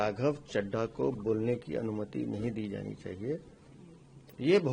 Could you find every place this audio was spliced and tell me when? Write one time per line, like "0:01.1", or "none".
none